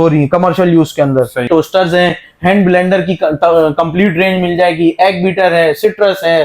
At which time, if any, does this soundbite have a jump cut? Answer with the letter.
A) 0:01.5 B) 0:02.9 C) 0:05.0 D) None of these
A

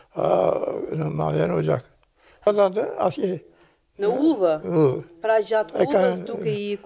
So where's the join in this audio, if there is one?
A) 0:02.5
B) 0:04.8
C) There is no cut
A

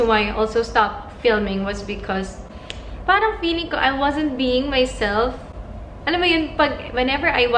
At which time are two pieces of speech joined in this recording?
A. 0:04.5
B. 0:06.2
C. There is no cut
C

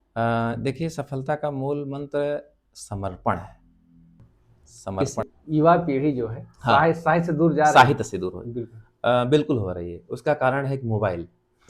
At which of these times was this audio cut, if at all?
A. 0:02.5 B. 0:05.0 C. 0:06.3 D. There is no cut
B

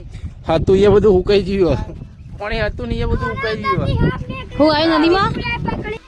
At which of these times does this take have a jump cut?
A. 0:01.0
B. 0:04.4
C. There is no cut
B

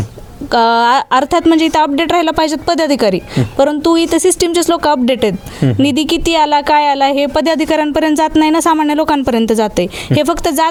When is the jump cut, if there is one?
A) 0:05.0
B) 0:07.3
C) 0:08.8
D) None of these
D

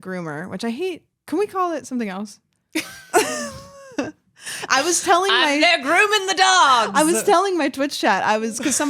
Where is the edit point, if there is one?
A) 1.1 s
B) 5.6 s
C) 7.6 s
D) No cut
A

